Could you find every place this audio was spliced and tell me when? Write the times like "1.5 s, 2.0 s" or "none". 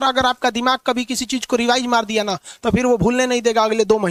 none

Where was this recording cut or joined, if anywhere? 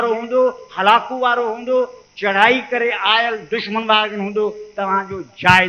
none

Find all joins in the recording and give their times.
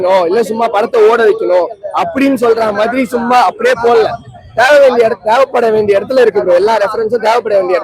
none

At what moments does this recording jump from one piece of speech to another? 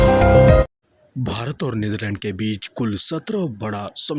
1.1 s

